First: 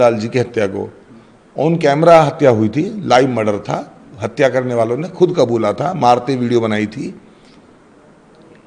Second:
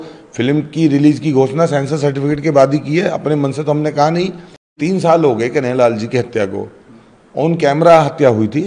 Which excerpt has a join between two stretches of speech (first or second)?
second